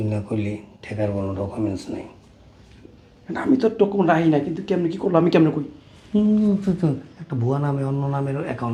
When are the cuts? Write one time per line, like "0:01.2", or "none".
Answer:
none